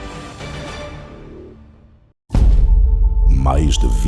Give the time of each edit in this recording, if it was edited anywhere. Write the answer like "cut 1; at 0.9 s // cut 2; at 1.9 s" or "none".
cut 1; at 2.2 s